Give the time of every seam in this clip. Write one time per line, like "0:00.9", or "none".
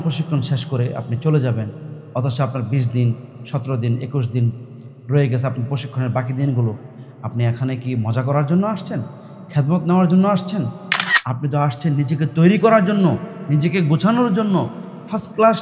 none

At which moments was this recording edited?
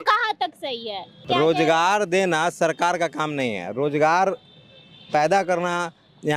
0:01.2

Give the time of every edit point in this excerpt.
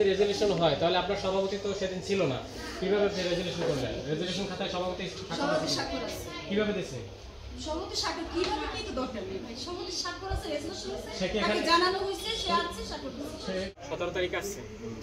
0:13.7

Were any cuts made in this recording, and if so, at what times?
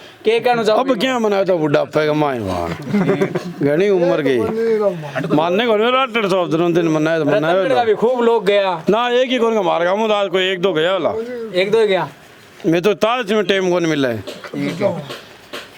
none

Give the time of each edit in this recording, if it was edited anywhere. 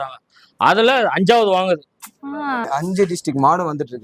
0:02.7

